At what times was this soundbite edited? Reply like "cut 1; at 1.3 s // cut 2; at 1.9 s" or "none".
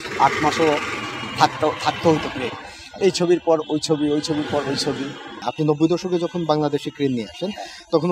none